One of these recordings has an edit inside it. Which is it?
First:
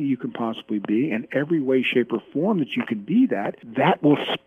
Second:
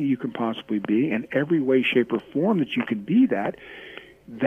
first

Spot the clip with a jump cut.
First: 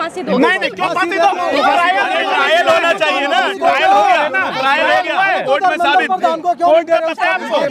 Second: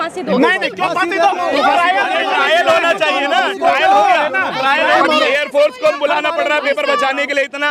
second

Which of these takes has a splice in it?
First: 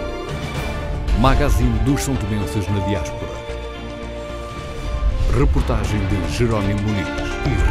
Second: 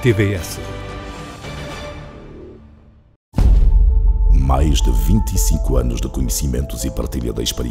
second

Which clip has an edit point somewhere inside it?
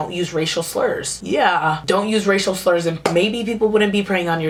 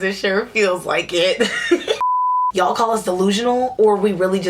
second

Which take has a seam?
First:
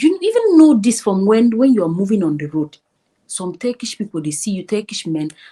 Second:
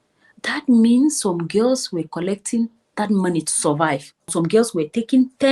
second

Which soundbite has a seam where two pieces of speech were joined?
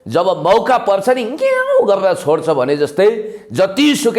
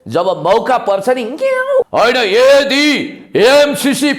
second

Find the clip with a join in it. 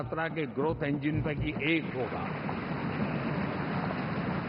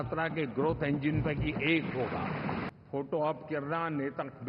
second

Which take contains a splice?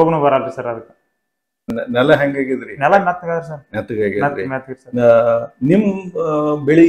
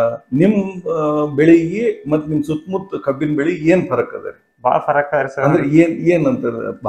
first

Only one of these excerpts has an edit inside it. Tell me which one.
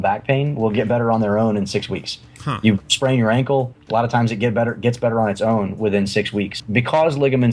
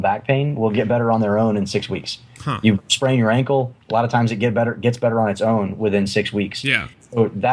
first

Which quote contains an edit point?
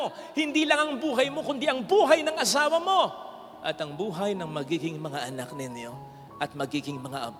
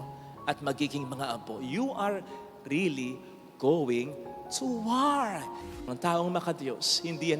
second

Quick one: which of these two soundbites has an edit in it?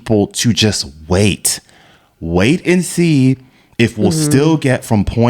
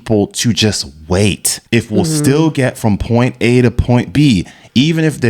second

